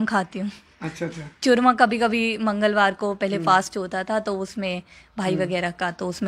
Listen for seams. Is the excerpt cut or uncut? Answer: uncut